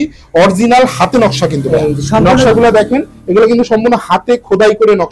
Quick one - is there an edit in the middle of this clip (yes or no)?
no